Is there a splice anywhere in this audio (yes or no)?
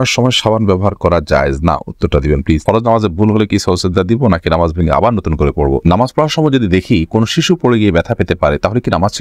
yes